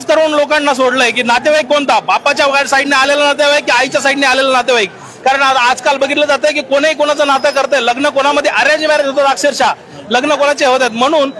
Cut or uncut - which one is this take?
uncut